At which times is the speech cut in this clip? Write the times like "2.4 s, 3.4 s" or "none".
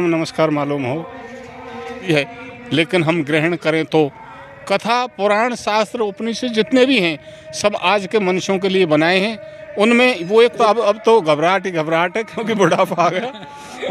2.1 s, 10.6 s